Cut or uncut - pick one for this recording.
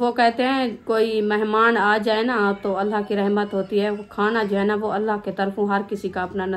uncut